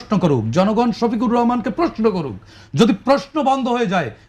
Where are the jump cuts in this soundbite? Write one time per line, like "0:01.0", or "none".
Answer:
none